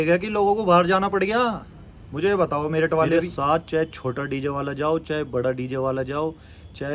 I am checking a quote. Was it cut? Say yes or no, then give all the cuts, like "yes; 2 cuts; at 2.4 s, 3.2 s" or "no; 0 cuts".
yes; 1 cut; at 3.1 s